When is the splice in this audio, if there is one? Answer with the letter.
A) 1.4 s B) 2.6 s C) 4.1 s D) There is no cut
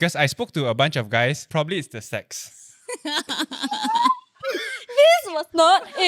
A